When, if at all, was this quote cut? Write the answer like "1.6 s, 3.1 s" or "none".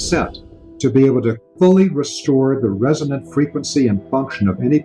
none